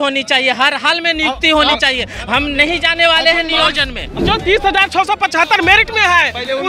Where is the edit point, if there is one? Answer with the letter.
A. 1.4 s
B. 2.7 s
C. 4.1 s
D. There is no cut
C